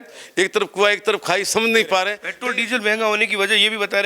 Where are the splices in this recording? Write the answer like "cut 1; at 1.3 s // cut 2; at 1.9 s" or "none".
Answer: cut 1; at 2.2 s